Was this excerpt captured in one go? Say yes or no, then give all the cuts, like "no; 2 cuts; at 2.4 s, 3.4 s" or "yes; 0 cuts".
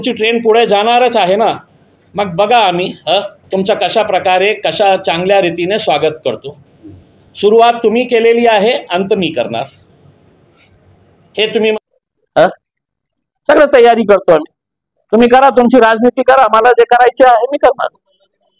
no; 1 cut; at 11.9 s